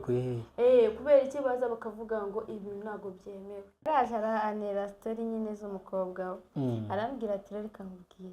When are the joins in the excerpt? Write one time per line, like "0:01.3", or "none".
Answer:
0:03.7